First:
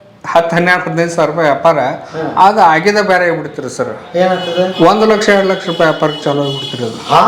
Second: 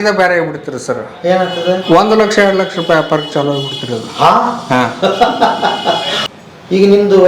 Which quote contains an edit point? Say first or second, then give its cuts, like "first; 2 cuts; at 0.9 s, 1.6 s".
second; 1 cut; at 6.2 s